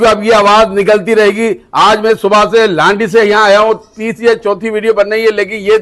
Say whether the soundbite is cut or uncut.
uncut